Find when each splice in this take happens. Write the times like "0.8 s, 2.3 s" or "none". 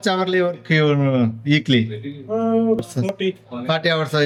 none